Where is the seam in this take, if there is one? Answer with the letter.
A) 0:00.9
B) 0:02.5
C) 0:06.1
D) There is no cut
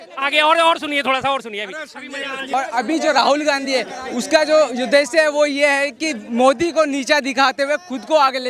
B